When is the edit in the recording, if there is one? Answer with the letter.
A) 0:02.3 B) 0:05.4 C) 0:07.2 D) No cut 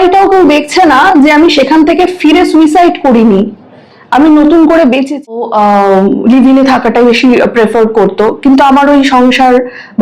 B